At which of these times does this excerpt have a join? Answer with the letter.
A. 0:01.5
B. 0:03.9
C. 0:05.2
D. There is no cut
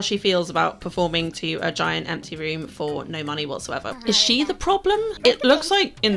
B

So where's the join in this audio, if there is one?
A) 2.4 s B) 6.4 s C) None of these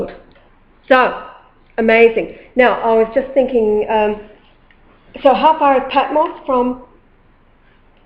A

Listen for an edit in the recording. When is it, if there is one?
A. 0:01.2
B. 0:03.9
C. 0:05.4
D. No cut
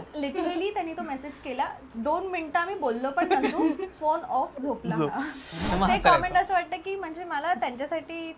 C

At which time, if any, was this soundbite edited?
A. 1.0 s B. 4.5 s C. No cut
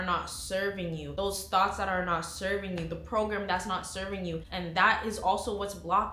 B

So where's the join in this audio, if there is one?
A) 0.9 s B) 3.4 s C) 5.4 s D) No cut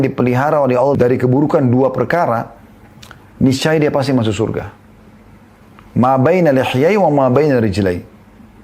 A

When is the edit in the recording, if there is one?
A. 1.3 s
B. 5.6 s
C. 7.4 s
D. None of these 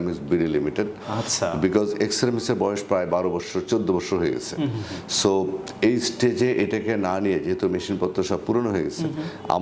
D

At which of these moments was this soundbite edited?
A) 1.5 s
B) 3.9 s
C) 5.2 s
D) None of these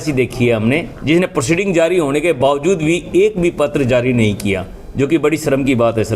D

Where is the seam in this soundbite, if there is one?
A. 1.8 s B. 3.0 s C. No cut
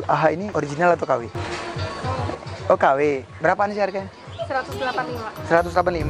C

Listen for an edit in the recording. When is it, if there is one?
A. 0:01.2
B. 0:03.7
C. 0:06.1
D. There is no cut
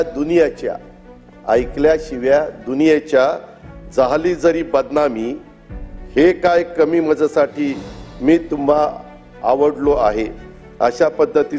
D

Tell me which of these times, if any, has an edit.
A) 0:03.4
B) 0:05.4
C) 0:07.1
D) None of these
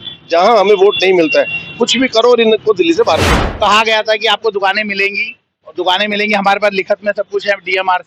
A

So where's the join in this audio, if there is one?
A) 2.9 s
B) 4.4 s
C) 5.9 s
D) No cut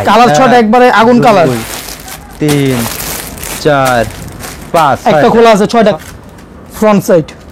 C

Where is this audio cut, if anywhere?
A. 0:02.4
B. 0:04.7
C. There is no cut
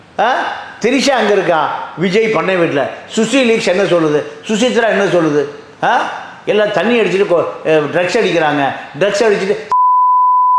C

